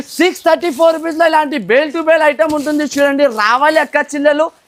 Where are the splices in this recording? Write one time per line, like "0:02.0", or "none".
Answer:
none